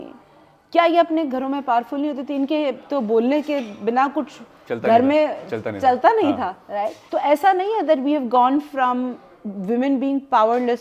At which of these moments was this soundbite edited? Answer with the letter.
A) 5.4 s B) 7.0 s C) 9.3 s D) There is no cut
B